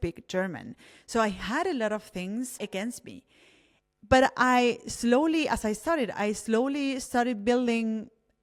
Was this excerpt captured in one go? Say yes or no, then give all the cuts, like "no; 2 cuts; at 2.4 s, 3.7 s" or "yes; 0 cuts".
yes; 0 cuts